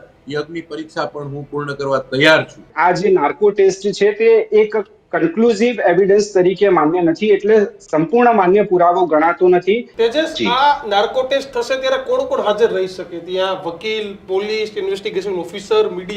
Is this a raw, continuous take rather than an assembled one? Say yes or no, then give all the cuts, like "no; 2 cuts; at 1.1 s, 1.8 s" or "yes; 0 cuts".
no; 2 cuts; at 2.7 s, 9.9 s